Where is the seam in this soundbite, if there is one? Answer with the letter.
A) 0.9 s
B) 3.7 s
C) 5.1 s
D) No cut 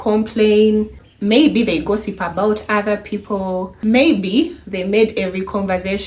D